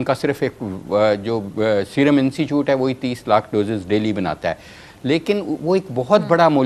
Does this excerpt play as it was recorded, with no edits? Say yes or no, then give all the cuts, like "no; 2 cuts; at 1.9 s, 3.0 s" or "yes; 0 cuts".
yes; 0 cuts